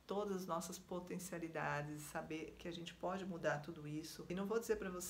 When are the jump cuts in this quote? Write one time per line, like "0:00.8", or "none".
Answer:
0:04.2